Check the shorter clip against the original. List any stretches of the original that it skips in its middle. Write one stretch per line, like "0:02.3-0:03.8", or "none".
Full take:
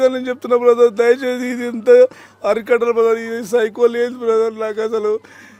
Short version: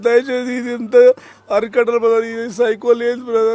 none